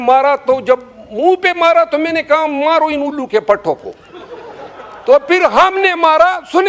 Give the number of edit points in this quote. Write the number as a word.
zero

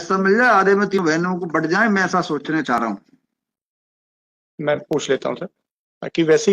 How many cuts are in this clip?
one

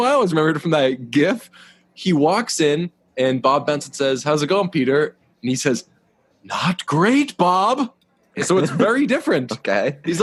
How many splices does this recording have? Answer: zero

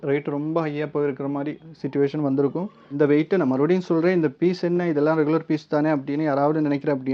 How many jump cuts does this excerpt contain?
one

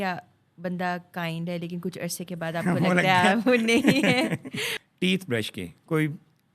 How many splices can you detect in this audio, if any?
one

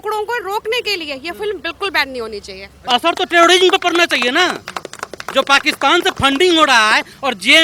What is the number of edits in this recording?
one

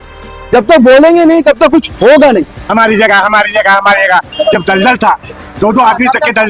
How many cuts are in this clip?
one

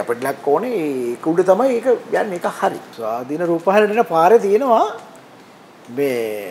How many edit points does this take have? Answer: one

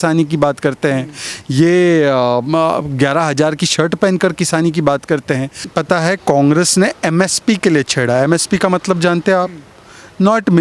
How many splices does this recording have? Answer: one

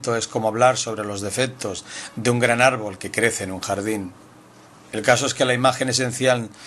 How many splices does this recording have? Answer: one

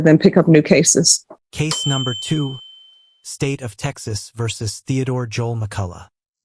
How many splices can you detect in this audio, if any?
zero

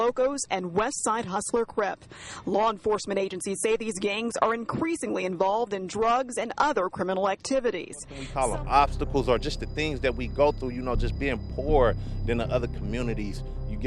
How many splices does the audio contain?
one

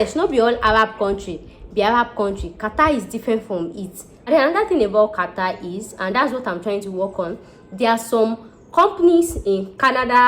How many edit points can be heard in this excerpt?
one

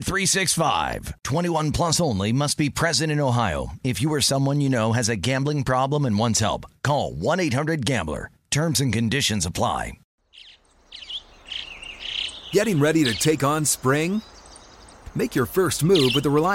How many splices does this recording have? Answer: one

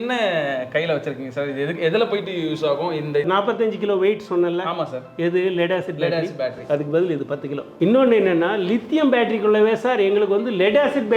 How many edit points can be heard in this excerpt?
two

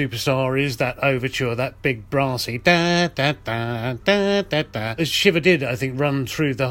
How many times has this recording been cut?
one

